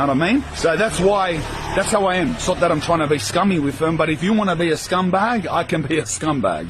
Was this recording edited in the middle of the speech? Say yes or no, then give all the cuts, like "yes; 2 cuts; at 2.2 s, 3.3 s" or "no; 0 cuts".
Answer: no; 0 cuts